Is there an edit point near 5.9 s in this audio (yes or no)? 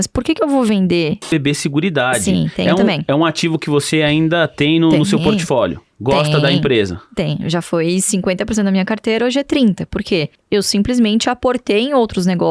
no